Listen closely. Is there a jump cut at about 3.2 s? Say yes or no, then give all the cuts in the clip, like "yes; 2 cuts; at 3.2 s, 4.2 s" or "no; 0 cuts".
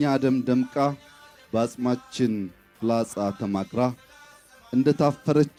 no; 0 cuts